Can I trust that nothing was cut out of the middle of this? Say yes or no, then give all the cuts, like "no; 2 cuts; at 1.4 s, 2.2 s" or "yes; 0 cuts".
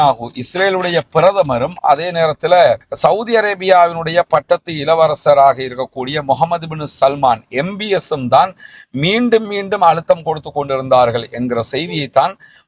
yes; 0 cuts